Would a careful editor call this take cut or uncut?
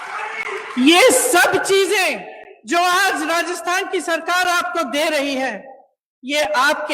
uncut